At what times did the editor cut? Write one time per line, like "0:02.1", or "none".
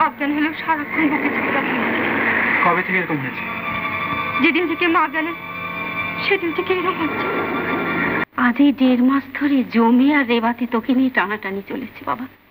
0:08.2